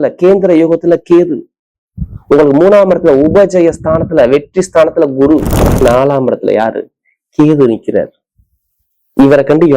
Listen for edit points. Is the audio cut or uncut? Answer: cut